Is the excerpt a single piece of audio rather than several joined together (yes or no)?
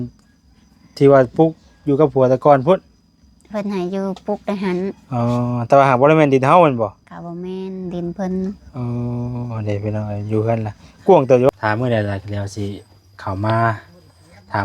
no